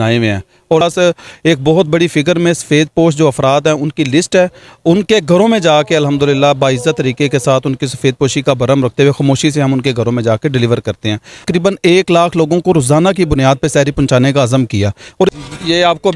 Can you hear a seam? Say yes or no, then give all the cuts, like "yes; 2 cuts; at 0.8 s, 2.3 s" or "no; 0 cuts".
yes; 3 cuts; at 0.8 s, 11.4 s, 15.4 s